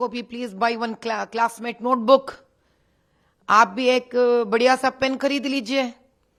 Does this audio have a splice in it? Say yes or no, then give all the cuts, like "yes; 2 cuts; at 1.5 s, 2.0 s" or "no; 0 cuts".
no; 0 cuts